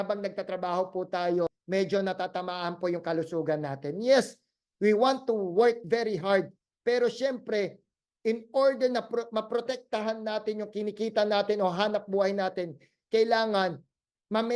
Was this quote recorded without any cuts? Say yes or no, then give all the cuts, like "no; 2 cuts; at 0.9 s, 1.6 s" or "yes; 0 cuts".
no; 1 cut; at 1.6 s